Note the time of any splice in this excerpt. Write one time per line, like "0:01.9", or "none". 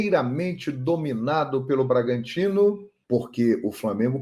0:02.9